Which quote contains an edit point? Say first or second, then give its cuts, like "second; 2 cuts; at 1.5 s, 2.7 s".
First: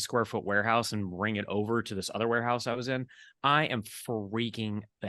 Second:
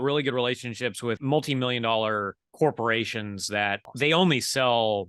second; 2 cuts; at 1.2 s, 3.9 s